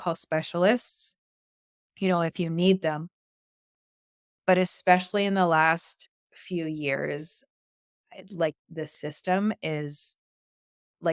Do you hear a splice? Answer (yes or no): no